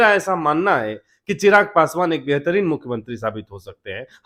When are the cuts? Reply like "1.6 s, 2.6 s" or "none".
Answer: none